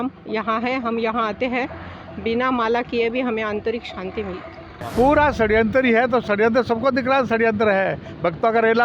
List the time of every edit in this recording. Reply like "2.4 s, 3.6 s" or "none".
4.7 s